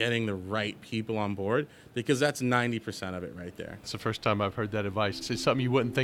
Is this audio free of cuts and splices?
no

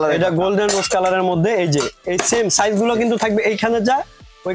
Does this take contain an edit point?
no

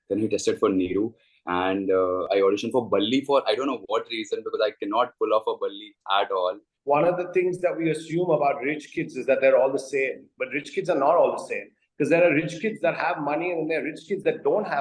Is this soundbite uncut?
no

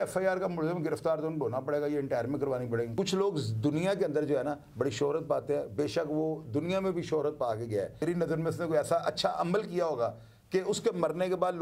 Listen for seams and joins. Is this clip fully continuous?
no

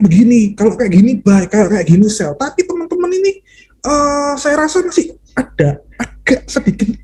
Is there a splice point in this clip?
no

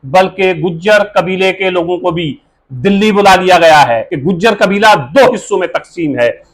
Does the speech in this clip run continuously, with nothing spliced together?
no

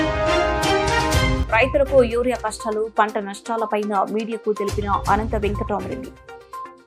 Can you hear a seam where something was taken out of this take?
yes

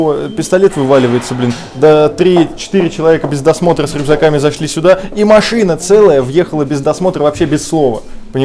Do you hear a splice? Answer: no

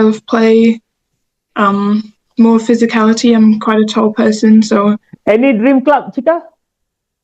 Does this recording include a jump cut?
yes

